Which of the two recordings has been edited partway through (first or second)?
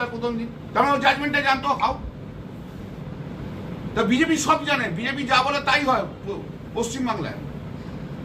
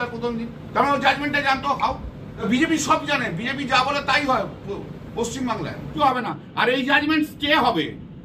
second